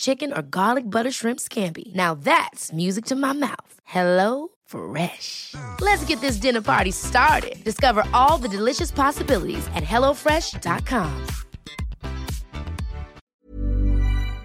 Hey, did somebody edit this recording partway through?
yes; 1 cut; at 13.2 s

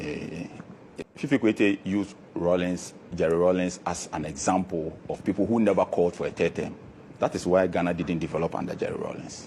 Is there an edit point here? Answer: yes; 1 cut; at 1.0 s

